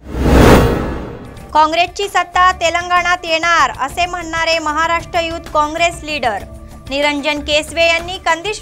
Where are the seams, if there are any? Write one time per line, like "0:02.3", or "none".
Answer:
0:00.9